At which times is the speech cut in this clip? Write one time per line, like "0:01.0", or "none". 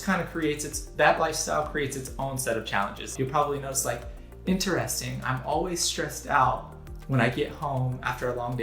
0:03.1